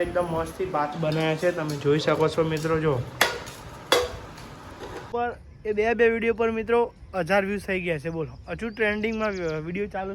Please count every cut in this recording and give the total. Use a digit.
1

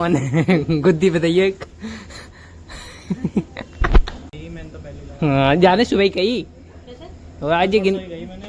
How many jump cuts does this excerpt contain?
1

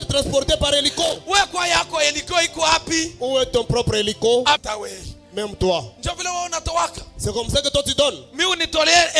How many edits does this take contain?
1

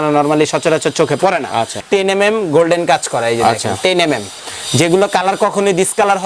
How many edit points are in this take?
1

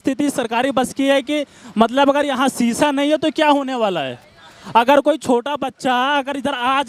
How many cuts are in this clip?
0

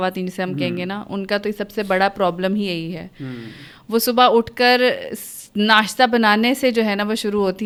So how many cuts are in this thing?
0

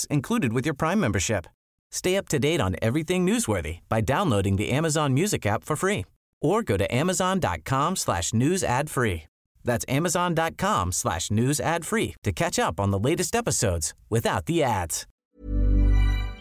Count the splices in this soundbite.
1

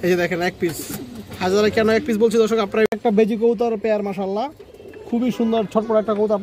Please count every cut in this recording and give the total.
1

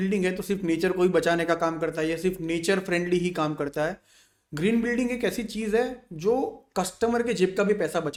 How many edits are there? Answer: 0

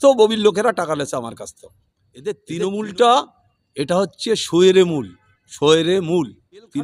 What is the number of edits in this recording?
1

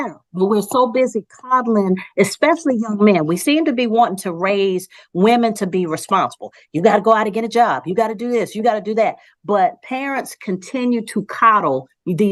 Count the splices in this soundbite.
0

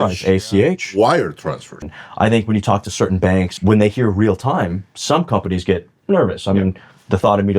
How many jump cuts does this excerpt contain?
2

